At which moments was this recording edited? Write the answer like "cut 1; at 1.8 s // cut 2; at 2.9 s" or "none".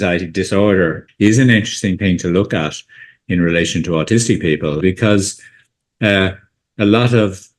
cut 1; at 1.0 s // cut 2; at 4.8 s

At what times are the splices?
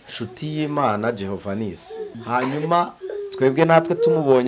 cut 1; at 2.2 s

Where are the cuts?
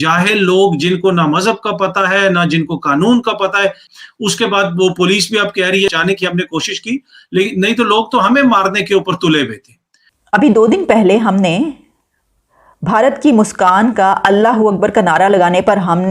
cut 1; at 3.9 s // cut 2; at 5.9 s

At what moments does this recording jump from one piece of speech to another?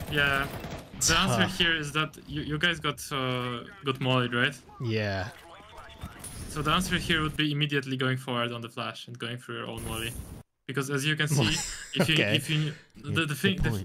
cut 1; at 1.0 s

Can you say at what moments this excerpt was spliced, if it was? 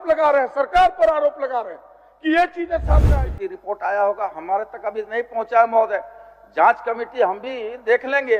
cut 1; at 3.1 s

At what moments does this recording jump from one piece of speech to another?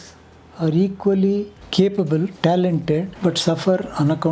cut 1; at 1.6 s // cut 2; at 2.3 s // cut 3; at 3.1 s

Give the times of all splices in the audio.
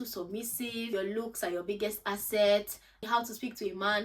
cut 1; at 0.9 s // cut 2; at 3.0 s

